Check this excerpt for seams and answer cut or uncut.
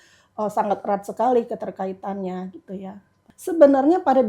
cut